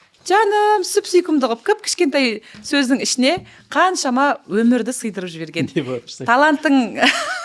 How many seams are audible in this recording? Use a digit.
0